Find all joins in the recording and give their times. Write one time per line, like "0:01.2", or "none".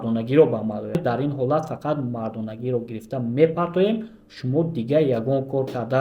0:01.0